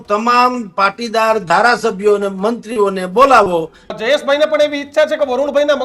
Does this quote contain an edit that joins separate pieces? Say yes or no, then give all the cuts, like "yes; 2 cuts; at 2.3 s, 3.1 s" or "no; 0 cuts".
yes; 1 cut; at 3.9 s